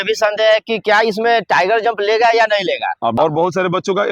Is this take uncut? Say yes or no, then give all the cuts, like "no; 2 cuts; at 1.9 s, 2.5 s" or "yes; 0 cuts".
no; 1 cut; at 3.1 s